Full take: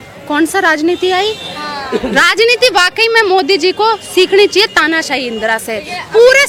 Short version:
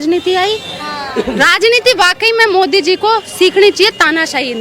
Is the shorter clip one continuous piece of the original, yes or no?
yes